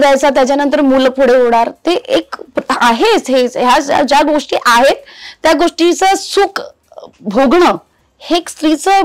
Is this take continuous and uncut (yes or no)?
yes